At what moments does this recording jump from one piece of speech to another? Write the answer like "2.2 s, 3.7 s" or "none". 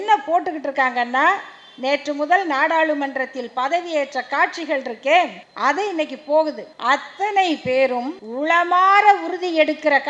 5.4 s, 6.7 s, 8.2 s